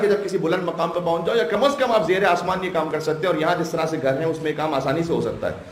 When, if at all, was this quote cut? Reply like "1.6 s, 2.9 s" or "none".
none